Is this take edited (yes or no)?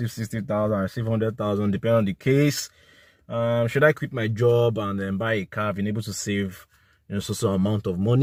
no